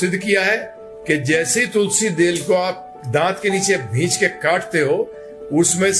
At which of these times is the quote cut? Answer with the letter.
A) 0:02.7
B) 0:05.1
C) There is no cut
C